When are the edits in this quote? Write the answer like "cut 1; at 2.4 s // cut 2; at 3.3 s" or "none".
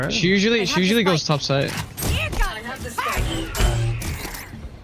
none